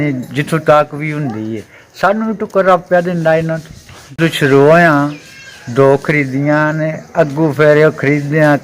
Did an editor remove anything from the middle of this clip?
yes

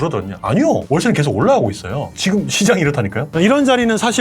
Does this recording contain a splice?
yes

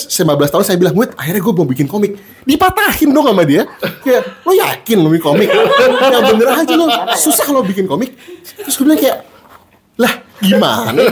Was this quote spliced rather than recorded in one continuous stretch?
no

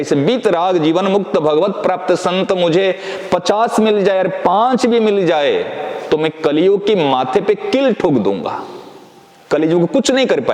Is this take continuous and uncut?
yes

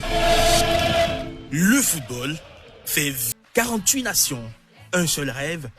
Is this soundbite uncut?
no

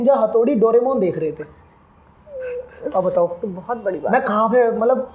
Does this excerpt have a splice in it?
no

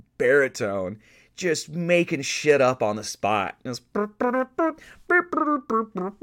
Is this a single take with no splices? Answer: yes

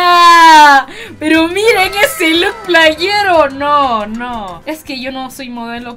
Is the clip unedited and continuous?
yes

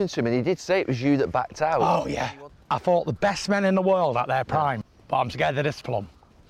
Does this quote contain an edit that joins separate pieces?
yes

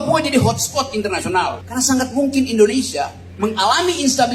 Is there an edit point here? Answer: yes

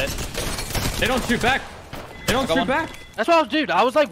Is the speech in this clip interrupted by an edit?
yes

